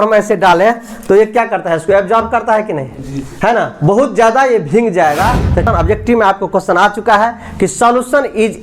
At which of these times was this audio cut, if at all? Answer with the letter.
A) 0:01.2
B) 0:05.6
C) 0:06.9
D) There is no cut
B